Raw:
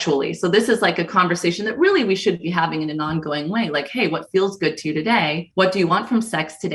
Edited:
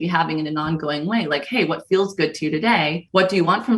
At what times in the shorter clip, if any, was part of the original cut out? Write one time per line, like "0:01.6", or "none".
none